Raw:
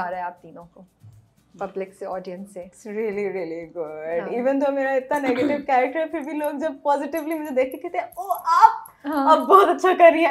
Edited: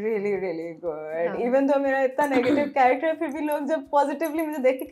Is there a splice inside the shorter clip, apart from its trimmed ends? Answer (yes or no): no